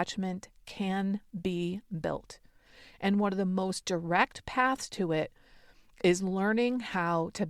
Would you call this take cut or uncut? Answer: uncut